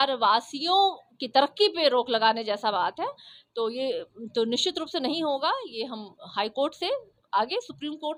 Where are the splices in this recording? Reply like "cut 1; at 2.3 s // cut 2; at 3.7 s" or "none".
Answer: none